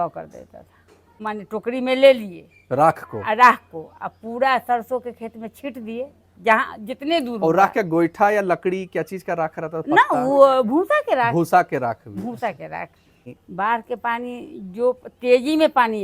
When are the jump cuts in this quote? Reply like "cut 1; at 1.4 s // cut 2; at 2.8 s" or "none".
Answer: cut 1; at 1.2 s // cut 2; at 13.3 s